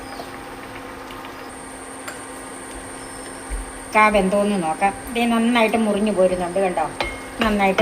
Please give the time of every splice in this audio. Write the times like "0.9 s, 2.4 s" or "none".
1.5 s